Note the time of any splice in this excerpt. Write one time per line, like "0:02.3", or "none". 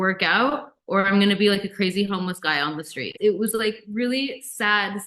0:03.0